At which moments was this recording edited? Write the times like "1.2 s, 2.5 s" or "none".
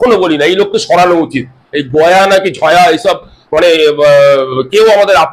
none